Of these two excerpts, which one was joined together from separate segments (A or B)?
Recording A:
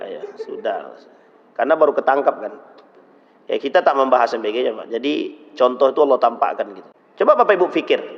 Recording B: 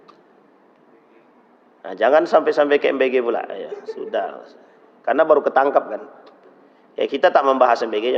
A